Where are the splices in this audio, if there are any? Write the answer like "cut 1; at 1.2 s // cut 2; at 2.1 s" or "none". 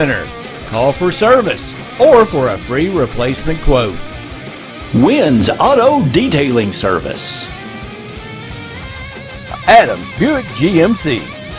none